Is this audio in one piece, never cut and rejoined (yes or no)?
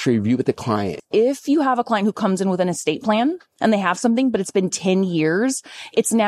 no